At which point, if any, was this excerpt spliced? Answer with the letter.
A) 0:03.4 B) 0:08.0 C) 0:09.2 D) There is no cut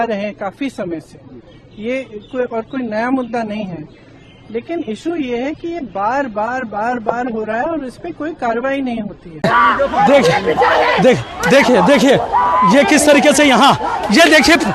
C